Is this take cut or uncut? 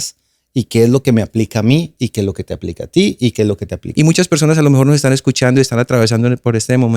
cut